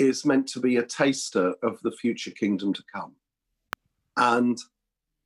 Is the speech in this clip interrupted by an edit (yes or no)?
no